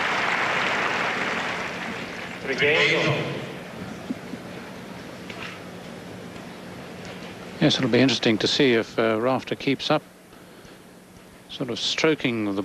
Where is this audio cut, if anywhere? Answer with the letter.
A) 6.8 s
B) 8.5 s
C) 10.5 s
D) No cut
A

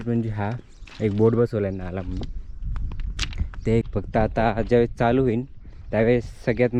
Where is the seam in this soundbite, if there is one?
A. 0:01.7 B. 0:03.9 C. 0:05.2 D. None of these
B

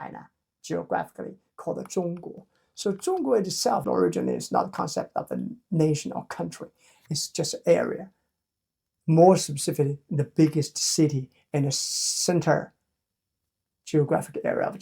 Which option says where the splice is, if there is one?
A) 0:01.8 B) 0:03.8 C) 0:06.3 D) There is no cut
B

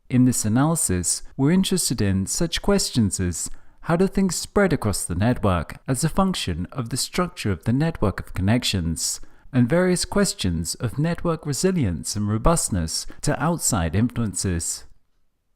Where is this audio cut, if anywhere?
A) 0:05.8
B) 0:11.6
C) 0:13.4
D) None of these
B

